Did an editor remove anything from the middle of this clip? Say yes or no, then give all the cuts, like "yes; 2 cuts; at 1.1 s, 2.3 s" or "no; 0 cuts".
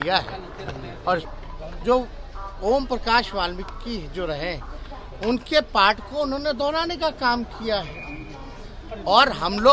yes; 1 cut; at 1.2 s